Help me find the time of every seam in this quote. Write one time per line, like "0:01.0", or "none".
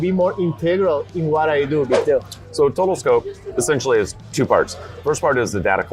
0:02.0